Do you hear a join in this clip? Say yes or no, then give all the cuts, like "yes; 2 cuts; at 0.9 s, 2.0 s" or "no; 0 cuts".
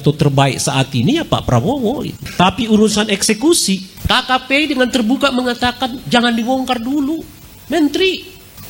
yes; 1 cut; at 3.9 s